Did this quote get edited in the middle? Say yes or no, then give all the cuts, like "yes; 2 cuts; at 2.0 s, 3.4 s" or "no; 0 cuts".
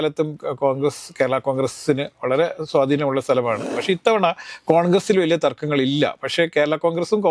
yes; 1 cut; at 3.7 s